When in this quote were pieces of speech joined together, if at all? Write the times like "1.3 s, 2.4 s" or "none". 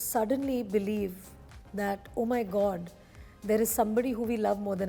none